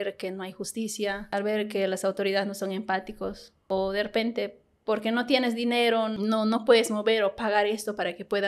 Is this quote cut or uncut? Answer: cut